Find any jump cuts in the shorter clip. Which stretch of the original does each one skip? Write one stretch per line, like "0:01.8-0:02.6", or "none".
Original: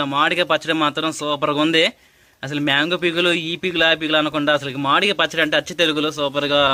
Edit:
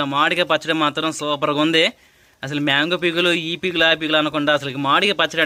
none